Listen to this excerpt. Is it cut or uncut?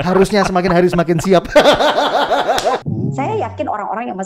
cut